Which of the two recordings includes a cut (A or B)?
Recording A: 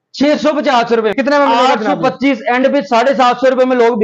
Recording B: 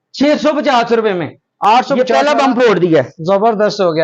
A